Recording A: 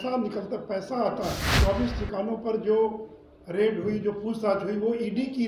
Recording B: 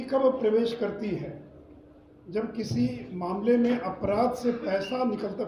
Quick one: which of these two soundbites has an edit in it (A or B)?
A